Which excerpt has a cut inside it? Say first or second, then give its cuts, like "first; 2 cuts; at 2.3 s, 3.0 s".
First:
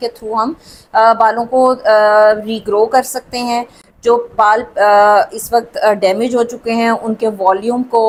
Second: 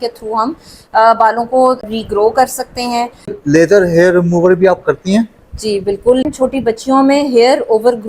second; 3 cuts; at 1.8 s, 3.4 s, 6.2 s